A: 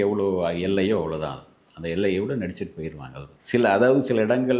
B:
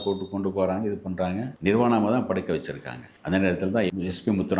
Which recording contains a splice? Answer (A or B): B